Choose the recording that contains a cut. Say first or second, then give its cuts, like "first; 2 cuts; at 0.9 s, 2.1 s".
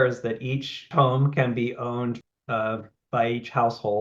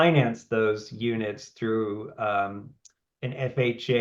first; 2 cuts; at 0.9 s, 2.2 s